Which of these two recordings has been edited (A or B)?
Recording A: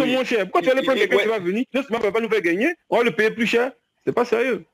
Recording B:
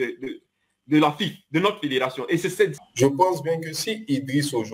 B